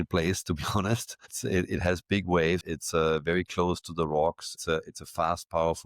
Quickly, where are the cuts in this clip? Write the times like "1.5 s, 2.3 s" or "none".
2.6 s